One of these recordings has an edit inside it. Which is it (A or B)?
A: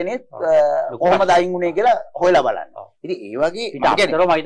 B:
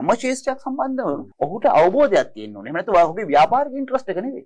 B